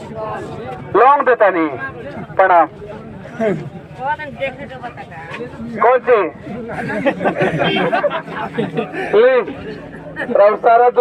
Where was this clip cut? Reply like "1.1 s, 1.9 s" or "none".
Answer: none